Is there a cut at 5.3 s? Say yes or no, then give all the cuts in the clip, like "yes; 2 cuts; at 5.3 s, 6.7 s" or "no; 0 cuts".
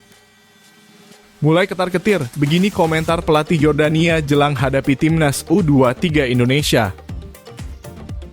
no; 2 cuts; at 1.4 s, 7.0 s